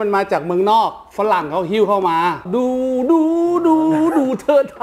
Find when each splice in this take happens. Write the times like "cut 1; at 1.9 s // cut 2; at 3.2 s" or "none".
cut 1; at 2.5 s